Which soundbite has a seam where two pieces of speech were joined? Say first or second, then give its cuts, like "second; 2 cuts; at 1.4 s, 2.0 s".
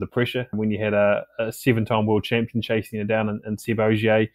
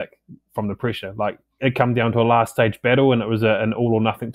second; 1 cut; at 1.6 s